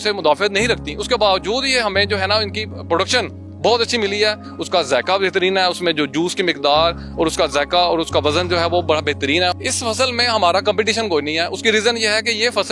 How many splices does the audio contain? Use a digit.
2